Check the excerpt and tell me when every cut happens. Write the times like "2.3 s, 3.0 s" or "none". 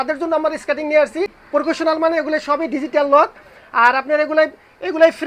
1.4 s